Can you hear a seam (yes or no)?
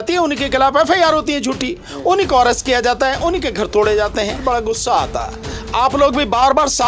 yes